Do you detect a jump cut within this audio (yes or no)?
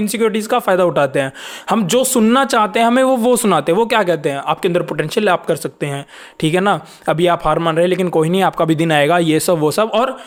no